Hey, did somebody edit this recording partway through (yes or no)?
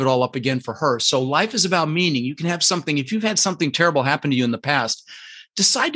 no